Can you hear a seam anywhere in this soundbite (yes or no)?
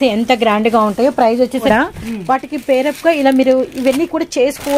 yes